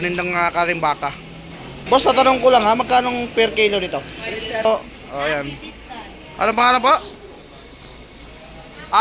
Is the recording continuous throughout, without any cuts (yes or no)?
no